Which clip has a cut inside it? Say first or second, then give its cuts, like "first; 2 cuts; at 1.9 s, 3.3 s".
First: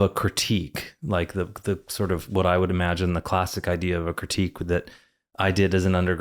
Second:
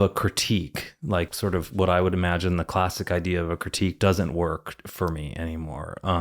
second; 2 cuts; at 1.3 s, 4.0 s